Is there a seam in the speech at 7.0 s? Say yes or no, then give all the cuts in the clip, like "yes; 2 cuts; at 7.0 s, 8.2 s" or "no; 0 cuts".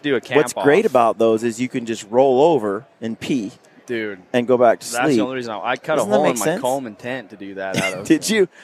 no; 0 cuts